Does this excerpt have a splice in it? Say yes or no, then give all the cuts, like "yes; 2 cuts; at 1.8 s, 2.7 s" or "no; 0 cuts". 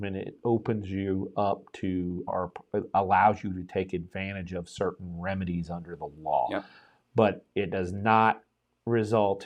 no; 0 cuts